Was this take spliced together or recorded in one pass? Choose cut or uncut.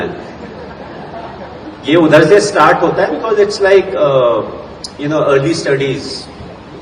uncut